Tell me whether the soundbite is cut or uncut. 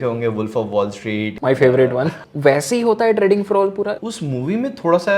cut